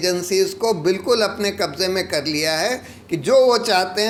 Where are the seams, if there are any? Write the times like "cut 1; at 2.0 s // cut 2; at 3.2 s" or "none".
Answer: none